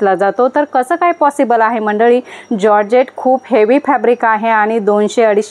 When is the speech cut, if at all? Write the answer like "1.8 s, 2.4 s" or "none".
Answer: none